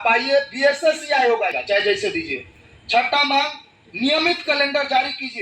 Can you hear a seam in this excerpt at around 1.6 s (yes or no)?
yes